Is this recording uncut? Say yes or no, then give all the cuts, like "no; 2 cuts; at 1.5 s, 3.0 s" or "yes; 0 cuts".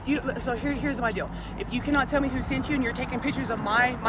yes; 0 cuts